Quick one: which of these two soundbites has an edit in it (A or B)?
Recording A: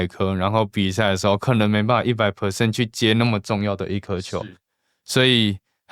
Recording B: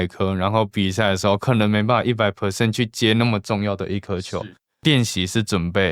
B